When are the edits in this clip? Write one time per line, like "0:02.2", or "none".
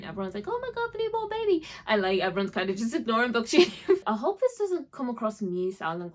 0:04.0